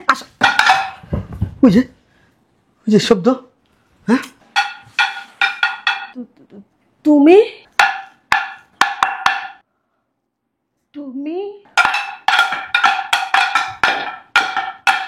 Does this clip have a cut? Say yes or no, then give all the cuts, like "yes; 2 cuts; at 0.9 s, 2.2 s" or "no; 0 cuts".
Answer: no; 0 cuts